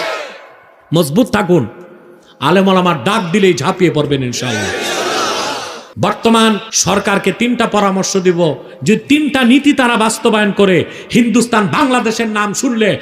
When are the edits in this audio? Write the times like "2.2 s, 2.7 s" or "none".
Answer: 5.8 s, 6.7 s